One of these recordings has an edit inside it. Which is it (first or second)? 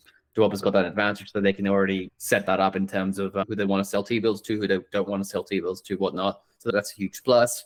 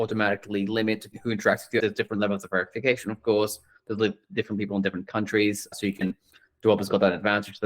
second